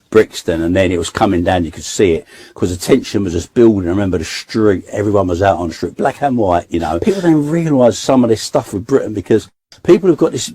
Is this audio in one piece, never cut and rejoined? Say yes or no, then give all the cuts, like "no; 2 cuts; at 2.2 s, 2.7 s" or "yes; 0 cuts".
no; 1 cut; at 6.9 s